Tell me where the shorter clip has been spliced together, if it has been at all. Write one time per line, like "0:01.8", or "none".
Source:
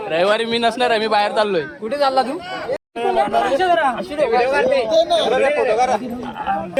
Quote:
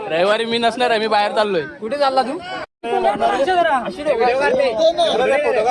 0:02.7